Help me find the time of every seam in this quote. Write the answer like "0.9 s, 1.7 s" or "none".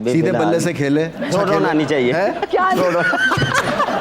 1.3 s